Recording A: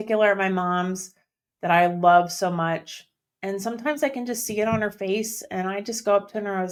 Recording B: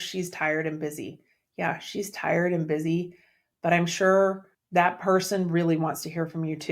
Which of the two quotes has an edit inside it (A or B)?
B